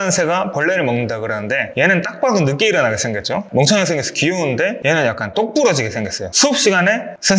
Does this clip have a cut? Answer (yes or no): no